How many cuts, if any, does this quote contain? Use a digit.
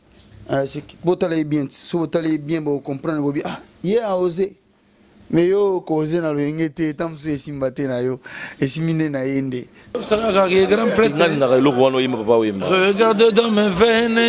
1